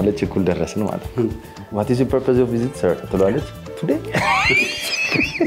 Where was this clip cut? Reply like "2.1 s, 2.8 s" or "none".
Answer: 1.7 s